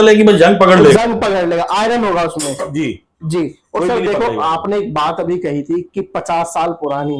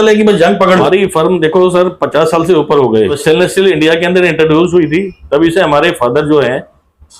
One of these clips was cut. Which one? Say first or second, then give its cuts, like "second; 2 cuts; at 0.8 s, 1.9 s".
second; 2 cuts; at 0.8 s, 3.2 s